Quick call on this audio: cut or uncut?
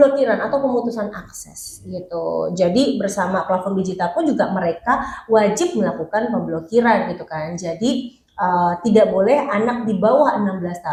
uncut